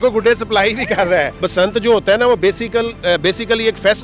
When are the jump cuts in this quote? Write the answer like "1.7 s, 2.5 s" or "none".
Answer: 1.4 s